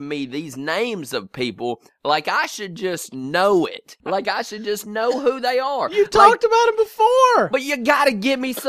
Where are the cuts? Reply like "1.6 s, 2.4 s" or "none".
3.9 s